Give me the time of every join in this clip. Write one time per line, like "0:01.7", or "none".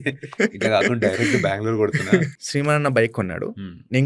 0:02.4